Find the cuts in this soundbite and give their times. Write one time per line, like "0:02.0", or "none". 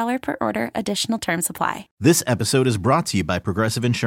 0:01.9